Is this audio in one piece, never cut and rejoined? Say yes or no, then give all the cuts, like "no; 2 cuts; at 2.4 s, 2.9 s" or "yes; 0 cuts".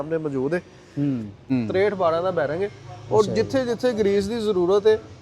no; 1 cut; at 1.4 s